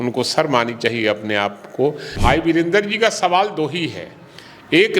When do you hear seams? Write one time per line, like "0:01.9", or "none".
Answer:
0:02.1